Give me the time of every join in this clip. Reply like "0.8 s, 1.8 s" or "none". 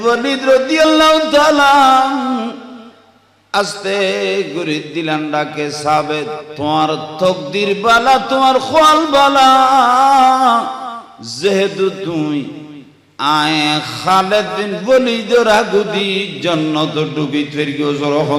6.5 s